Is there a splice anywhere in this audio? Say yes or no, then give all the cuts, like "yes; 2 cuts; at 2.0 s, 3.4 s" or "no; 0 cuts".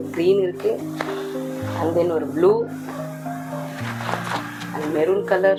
no; 0 cuts